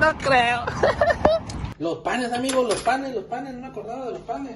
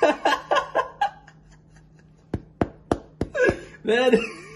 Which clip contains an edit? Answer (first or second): first